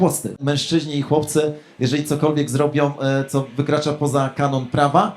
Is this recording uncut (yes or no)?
yes